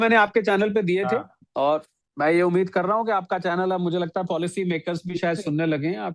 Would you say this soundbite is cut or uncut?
uncut